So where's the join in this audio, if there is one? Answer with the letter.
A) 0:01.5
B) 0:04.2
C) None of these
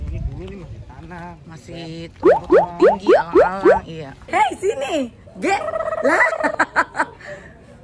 B